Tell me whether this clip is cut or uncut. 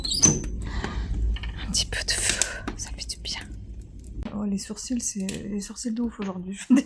cut